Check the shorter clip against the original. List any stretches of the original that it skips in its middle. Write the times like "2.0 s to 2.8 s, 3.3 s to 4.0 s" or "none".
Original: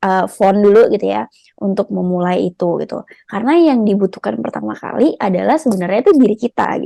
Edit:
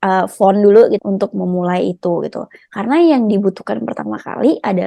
1.0 s to 1.6 s